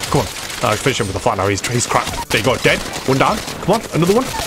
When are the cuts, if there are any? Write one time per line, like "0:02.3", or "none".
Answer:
0:03.5